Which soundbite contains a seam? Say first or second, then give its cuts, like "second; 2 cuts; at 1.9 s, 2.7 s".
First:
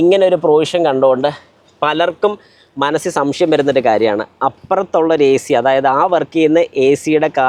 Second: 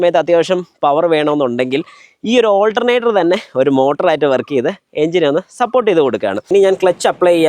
second; 1 cut; at 6.5 s